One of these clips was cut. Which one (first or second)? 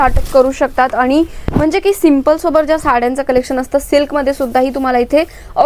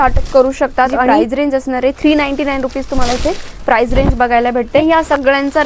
second